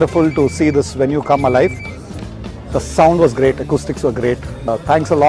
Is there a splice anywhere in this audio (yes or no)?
no